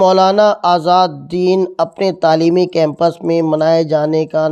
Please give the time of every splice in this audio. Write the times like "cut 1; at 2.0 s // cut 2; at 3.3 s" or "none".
none